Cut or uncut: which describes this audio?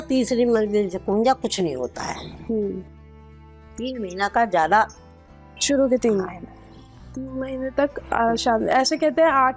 uncut